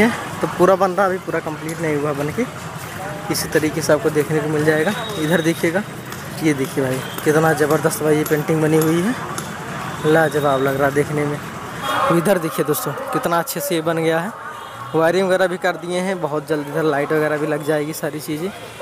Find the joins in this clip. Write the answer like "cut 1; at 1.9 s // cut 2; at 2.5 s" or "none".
cut 1; at 11.8 s